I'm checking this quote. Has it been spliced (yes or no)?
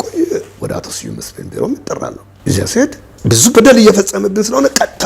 yes